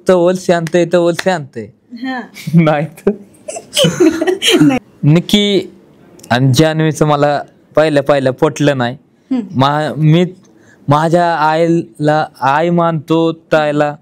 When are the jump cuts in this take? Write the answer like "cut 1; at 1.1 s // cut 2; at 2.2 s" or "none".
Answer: cut 1; at 4.8 s